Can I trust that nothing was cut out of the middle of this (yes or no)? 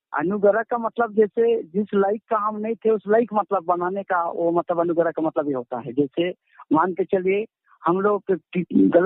yes